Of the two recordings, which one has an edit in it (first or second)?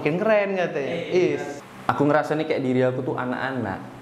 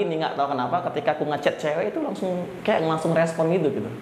first